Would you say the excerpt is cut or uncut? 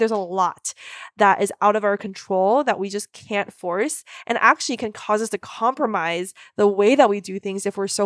uncut